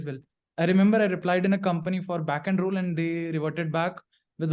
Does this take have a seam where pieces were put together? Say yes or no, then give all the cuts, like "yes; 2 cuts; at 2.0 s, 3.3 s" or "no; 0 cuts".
yes; 1 cut; at 1.2 s